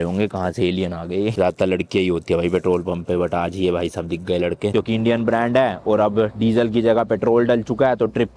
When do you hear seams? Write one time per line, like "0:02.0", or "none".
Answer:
0:01.3
0:04.7